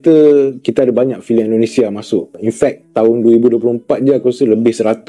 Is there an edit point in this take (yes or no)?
no